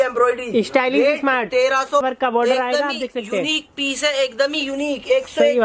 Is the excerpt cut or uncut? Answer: cut